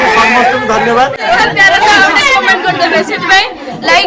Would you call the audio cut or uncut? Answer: cut